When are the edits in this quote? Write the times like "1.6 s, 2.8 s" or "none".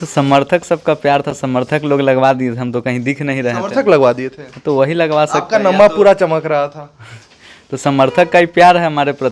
none